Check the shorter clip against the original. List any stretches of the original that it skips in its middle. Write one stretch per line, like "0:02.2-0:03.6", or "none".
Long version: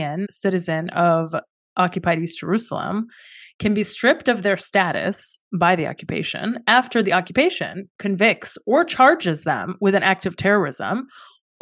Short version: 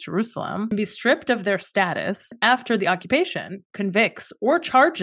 0:03.1-0:03.7
0:05.3-0:06.6